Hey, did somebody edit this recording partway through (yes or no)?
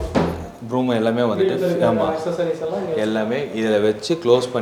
no